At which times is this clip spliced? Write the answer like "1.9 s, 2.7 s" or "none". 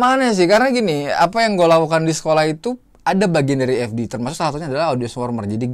none